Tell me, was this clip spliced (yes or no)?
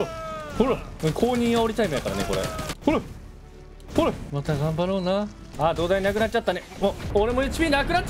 yes